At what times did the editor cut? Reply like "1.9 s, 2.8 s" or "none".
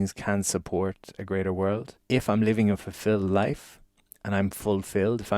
1.9 s